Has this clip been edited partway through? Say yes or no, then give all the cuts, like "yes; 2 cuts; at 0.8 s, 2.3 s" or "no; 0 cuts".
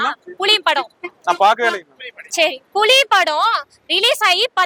no; 0 cuts